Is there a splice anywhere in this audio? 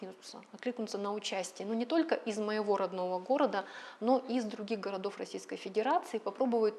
no; 0 cuts

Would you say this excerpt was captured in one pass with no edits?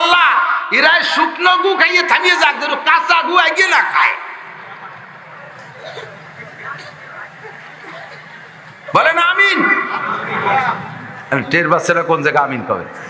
yes; 0 cuts

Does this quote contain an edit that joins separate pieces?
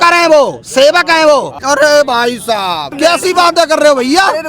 yes; 2 cuts; at 1.5 s, 2.9 s

